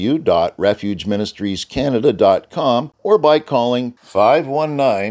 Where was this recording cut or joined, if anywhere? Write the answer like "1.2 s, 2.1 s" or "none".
2.9 s